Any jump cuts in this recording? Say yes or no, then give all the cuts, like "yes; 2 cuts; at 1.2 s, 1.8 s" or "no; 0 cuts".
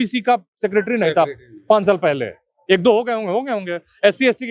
no; 0 cuts